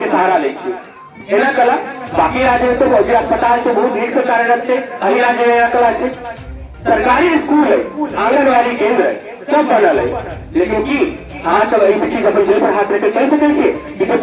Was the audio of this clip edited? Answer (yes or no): no